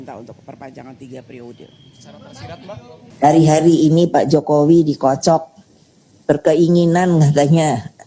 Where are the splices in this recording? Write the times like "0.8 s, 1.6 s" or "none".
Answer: 3.2 s

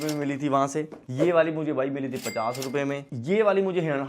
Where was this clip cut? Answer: 3.1 s

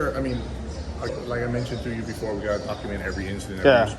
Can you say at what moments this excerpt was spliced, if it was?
1.1 s

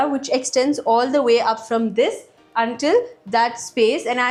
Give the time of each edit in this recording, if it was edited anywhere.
none

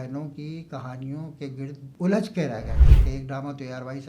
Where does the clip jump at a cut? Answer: 2.9 s

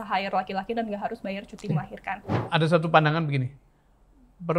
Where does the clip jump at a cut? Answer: 2.3 s

